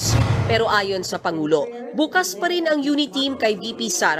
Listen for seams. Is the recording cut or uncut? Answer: uncut